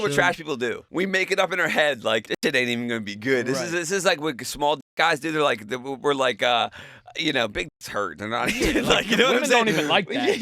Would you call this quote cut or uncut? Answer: cut